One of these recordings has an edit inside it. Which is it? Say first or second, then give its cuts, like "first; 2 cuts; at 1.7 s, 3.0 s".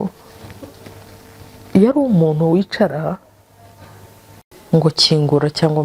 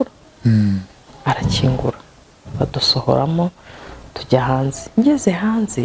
first; 1 cut; at 4.5 s